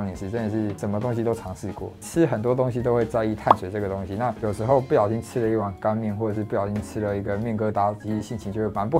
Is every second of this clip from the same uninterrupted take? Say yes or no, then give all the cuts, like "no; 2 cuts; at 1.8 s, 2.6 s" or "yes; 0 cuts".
yes; 0 cuts